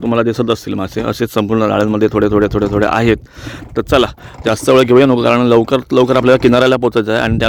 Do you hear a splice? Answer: no; 0 cuts

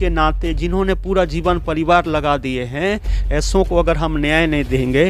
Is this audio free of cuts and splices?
yes; 0 cuts

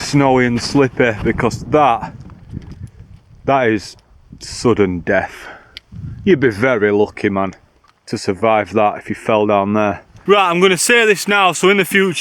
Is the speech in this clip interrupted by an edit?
yes; 1 cut; at 10.1 s

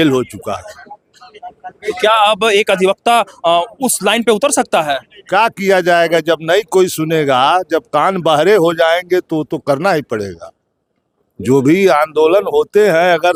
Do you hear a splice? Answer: no; 0 cuts

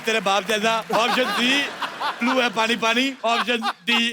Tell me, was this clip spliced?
yes; 2 cuts; at 0.9 s, 3.2 s

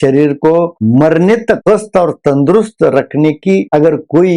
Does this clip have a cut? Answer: yes; 1 cut; at 1.6 s

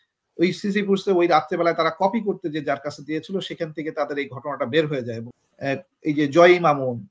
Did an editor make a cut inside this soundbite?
yes; 1 cut; at 5.3 s

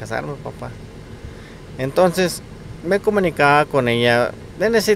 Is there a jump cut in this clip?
no; 0 cuts

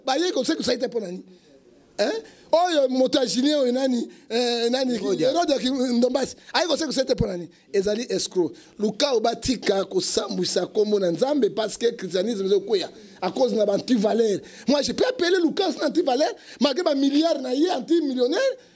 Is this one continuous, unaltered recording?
yes; 0 cuts

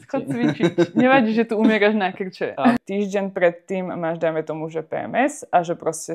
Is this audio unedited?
no; 1 cut; at 2.8 s

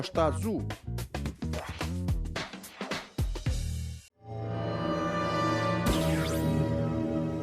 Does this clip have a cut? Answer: yes; 1 cut; at 3.9 s

